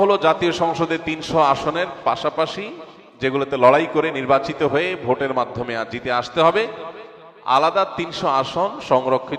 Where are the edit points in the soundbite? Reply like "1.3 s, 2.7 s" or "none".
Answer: none